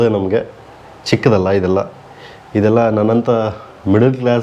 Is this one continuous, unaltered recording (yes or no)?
yes